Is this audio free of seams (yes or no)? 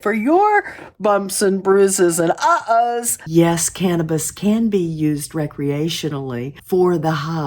no